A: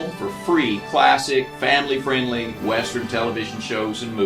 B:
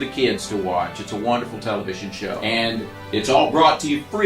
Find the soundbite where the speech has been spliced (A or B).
B